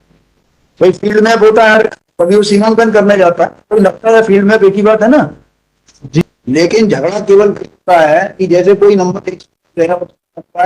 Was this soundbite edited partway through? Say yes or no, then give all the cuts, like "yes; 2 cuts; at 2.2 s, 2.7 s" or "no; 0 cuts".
yes; 1 cut; at 6.2 s